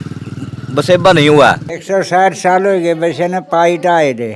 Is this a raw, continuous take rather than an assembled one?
no; 1 cut; at 1.7 s

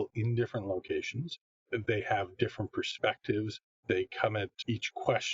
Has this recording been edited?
yes; 2 cuts; at 3.7 s, 4.5 s

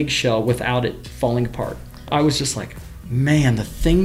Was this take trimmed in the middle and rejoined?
yes; 2 cuts; at 1.1 s, 2.1 s

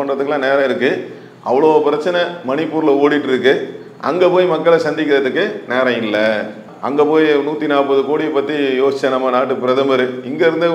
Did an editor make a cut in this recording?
no; 0 cuts

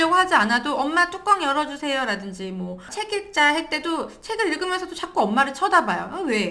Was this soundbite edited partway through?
yes; 1 cut; at 3.0 s

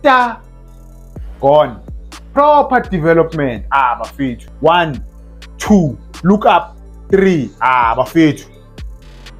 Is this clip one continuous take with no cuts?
no; 1 cut; at 4.5 s

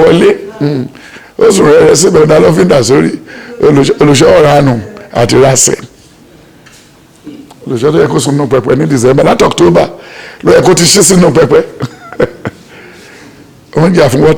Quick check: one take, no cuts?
yes; 0 cuts

